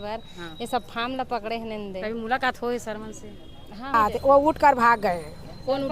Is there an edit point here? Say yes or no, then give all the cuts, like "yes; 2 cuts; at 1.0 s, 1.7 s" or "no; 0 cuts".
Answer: yes; 1 cut; at 3.9 s